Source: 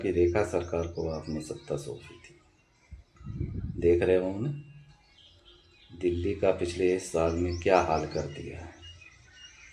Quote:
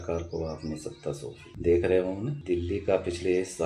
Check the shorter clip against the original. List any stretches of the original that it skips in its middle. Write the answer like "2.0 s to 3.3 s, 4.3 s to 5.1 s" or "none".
2.1 s to 3.7 s, 4.5 s to 5.9 s